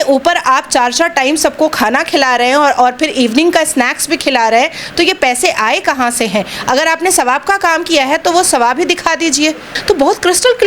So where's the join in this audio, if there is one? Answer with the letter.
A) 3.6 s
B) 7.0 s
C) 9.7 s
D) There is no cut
C